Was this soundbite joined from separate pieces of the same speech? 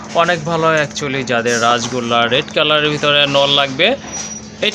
no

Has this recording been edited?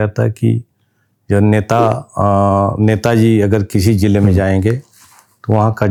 no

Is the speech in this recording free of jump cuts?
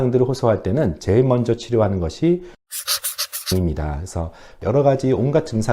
no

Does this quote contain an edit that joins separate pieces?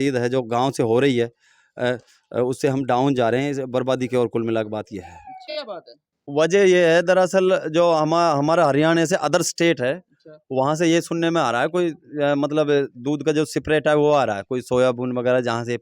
yes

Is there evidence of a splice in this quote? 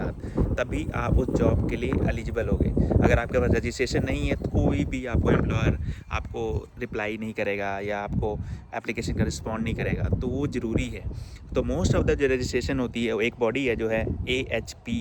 no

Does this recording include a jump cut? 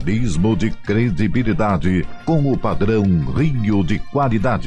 no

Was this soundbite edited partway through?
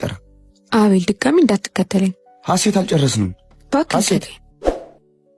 yes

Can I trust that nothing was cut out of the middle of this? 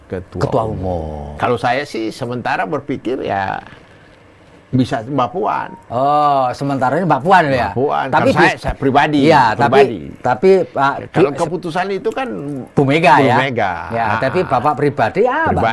no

